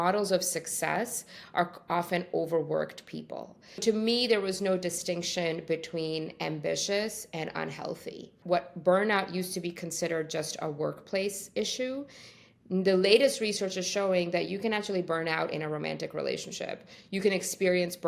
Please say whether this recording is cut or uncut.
cut